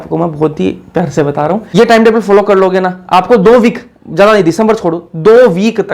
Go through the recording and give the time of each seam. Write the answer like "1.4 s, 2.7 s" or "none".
1.7 s